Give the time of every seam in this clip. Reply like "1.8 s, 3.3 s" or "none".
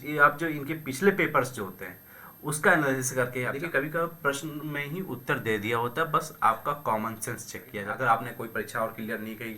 3.6 s, 7.8 s